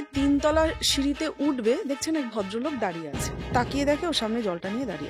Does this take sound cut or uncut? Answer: cut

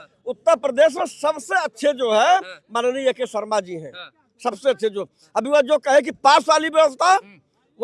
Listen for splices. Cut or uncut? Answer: uncut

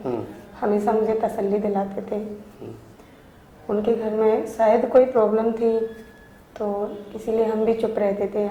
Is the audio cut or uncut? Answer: uncut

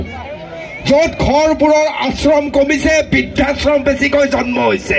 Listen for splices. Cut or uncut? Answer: uncut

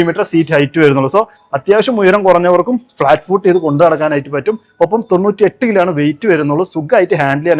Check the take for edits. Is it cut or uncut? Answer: uncut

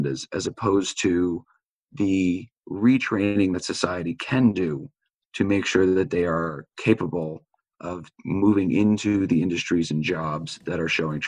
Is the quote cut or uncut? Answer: uncut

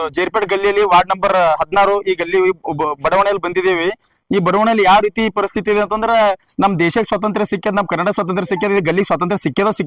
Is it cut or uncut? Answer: uncut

